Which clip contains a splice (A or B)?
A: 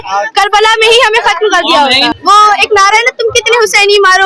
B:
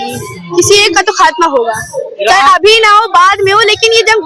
A